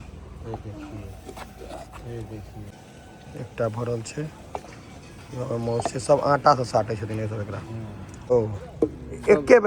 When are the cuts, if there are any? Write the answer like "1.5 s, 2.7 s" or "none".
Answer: 2.7 s, 8.3 s